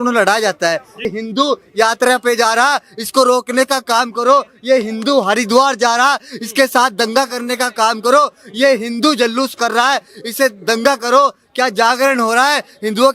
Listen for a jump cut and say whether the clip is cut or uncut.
cut